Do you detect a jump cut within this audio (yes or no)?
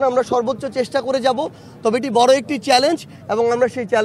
no